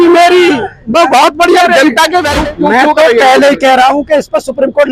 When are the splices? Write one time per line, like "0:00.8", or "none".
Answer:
0:02.3

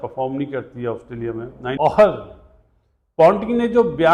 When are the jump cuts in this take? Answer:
0:01.8

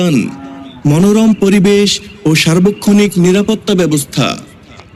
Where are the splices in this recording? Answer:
none

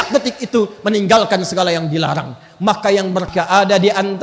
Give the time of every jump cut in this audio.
0:03.3

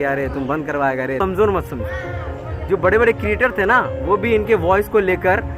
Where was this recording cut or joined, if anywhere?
0:01.2

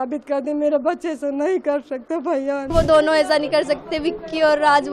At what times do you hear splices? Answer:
0:02.7

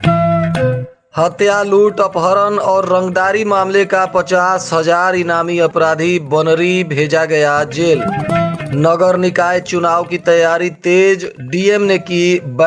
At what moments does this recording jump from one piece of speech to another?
0:00.9

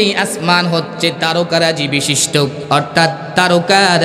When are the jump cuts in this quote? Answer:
0:02.6

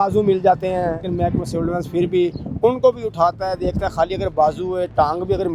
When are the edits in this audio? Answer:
0:01.1

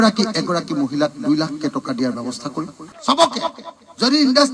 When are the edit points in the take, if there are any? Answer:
0:02.8

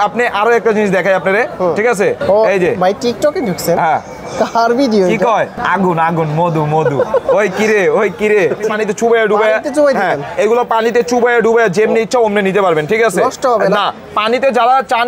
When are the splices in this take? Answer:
0:02.2
0:05.6
0:08.7

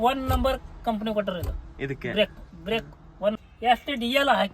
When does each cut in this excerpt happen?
0:03.4

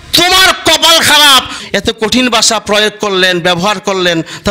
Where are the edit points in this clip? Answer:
0:01.5

